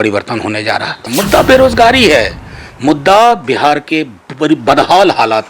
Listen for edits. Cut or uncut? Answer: cut